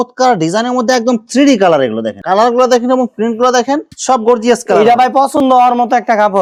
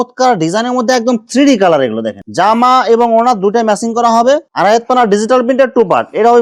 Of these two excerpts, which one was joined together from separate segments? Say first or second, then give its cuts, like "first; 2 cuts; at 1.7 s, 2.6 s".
second; 2 cuts; at 2.2 s, 4.5 s